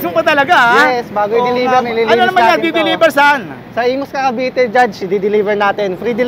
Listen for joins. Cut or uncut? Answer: uncut